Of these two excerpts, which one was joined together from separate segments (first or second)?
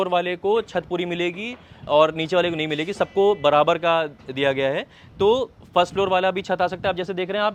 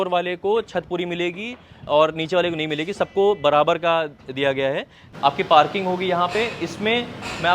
second